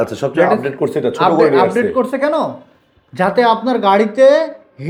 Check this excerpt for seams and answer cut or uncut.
uncut